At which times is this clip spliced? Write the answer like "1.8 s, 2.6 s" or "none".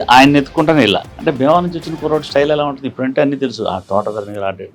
1.1 s